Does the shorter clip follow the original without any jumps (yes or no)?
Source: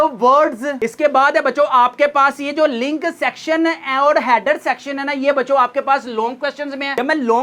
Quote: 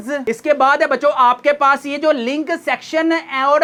yes